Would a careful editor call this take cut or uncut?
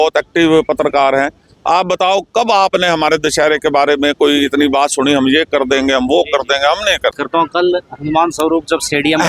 cut